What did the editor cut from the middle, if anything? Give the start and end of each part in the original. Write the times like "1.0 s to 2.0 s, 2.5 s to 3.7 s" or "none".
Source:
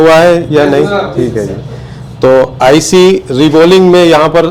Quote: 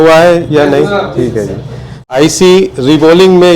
2.1 s to 2.6 s